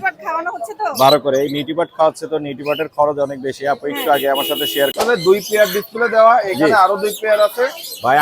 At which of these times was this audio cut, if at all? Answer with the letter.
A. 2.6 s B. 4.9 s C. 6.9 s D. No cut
B